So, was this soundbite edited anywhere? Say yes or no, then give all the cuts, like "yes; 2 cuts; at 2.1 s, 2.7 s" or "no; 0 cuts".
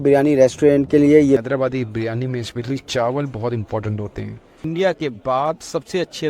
yes; 2 cuts; at 1.4 s, 4.6 s